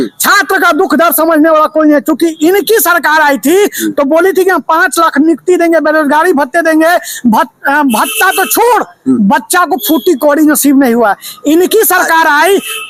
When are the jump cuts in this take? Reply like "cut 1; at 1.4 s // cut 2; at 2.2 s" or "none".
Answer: none